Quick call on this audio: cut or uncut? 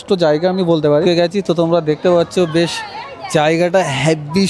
cut